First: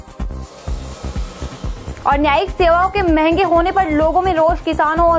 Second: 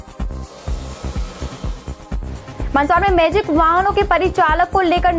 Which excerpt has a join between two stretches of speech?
first; 1 cut; at 1.7 s

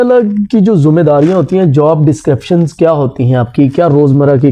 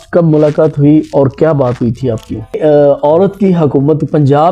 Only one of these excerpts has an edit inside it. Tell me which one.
second; 1 cut; at 2.5 s

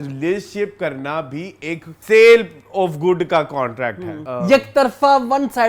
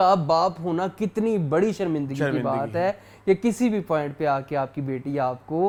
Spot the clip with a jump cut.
first; 2 cuts; at 1.9 s, 4.2 s

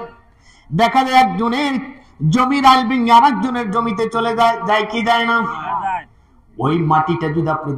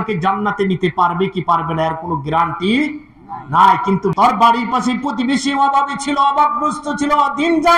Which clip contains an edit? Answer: second; 1 cut; at 4.1 s

